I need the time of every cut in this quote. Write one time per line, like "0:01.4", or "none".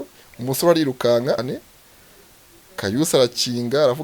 0:01.5